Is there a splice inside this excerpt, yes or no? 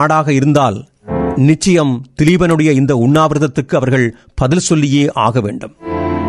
no